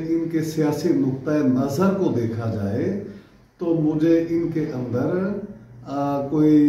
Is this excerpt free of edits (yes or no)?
yes